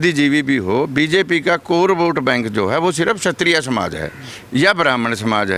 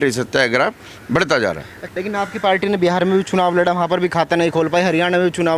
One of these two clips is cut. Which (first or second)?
second